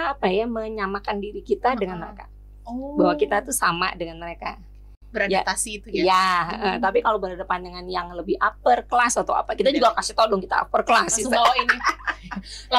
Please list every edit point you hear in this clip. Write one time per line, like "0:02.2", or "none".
none